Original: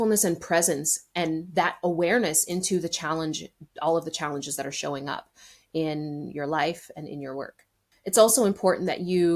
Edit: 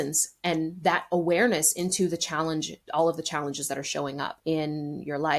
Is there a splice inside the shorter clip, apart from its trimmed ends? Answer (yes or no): yes